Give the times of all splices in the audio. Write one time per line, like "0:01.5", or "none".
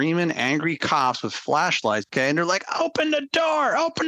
0:02.1